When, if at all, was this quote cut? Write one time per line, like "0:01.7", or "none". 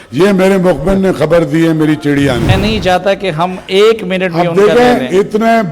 0:02.5